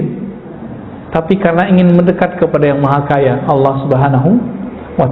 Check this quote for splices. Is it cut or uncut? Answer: uncut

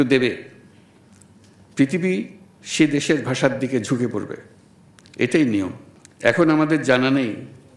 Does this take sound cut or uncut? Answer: uncut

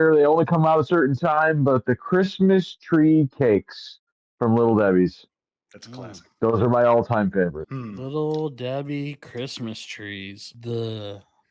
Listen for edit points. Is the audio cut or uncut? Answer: cut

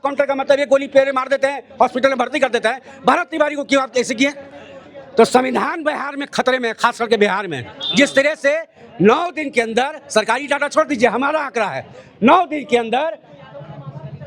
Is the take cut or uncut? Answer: uncut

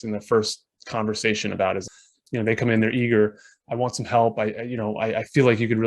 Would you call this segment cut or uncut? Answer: cut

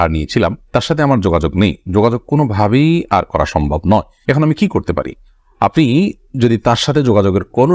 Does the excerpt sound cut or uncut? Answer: uncut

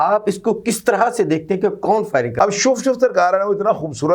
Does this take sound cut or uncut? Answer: cut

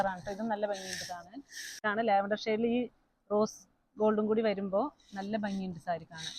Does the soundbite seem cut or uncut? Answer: cut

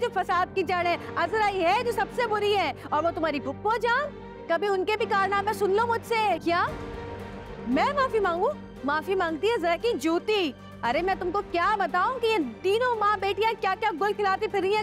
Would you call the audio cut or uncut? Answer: cut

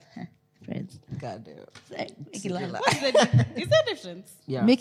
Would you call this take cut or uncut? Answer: uncut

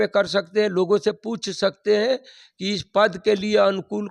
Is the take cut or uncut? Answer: uncut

